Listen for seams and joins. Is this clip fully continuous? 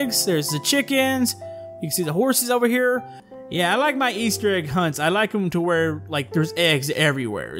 no; 1 cut; at 3.2 s

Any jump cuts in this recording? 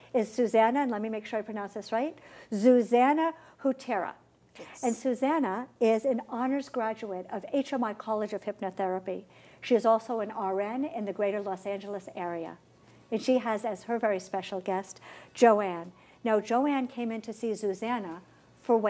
no; 0 cuts

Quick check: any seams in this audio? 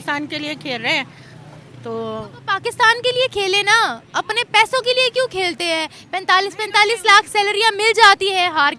no; 0 cuts

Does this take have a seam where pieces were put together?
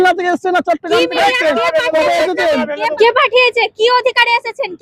yes; 1 cut; at 2.9 s

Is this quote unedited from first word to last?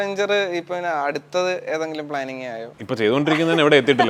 no; 1 cut; at 2.7 s

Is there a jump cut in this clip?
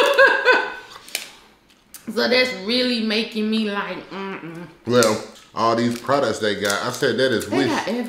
yes; 1 cut; at 5.4 s

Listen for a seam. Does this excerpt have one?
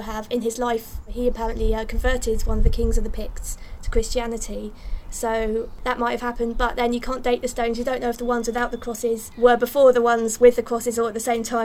yes; 3 cuts; at 1.1 s, 5.7 s, 9.3 s

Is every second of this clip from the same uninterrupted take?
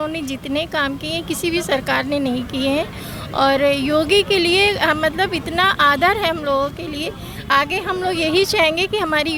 yes; 0 cuts

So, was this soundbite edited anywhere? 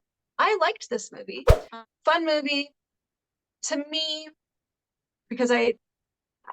yes; 1 cut; at 1.6 s

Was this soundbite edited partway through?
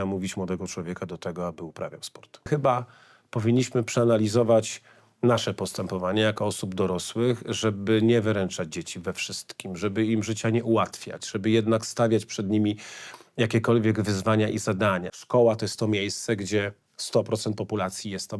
yes; 2 cuts; at 2.5 s, 15.1 s

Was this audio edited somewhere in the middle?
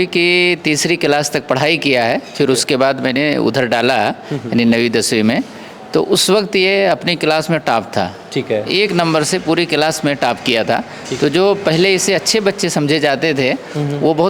no; 0 cuts

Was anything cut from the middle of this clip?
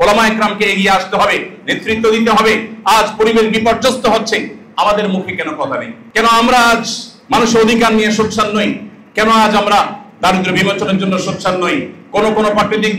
yes; 1 cut; at 6.0 s

